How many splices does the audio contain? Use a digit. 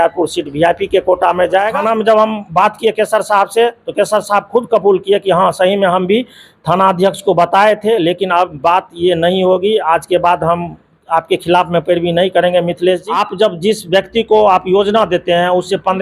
2